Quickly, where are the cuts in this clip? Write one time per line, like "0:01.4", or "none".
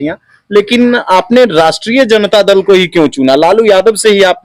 none